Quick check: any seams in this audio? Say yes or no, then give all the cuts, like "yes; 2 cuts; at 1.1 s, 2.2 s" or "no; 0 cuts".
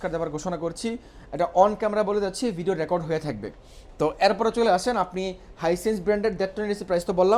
no; 0 cuts